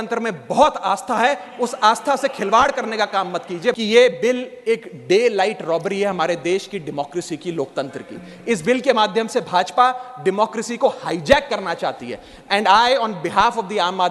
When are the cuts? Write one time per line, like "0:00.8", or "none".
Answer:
0:03.8